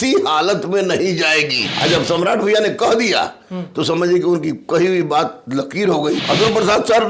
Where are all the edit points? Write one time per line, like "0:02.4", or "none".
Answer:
0:01.7
0:06.2